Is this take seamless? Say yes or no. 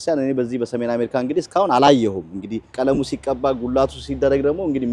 no